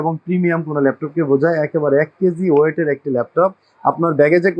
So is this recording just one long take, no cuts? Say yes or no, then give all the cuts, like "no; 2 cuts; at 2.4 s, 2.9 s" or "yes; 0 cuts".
yes; 0 cuts